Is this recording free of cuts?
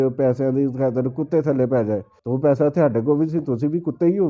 no; 1 cut; at 2.1 s

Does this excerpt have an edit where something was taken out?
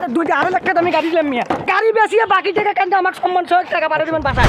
no; 0 cuts

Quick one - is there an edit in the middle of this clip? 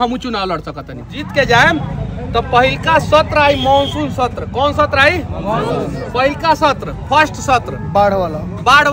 yes; 1 cut; at 1.3 s

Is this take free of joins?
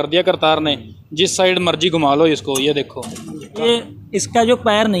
no; 1 cut; at 3.6 s

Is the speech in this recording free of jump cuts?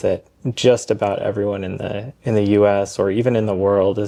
yes; 0 cuts

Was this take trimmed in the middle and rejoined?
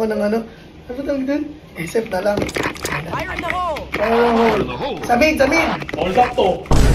no; 0 cuts

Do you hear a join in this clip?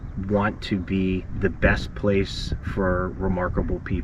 yes; 1 cut; at 1.3 s

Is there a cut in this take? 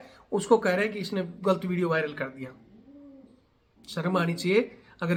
no; 0 cuts

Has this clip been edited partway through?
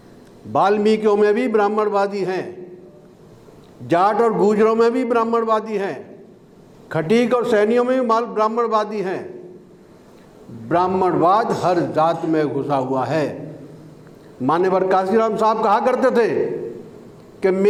no; 0 cuts

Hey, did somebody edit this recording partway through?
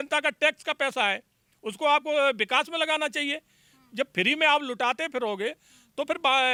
no; 0 cuts

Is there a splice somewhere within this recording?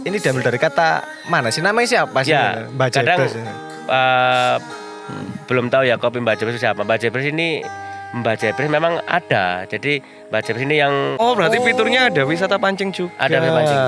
yes; 1 cut; at 11.2 s

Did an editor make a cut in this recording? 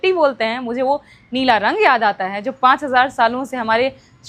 no; 0 cuts

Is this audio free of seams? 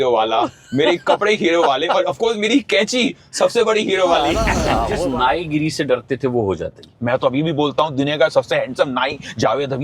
no; 1 cut; at 5.0 s

